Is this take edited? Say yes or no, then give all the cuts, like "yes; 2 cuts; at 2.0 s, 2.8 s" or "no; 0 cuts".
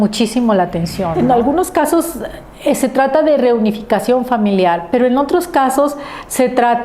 yes; 1 cut; at 1.1 s